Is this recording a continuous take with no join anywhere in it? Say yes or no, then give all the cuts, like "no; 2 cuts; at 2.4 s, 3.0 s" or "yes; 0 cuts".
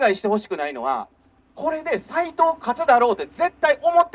yes; 0 cuts